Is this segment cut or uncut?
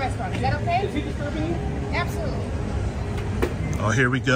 uncut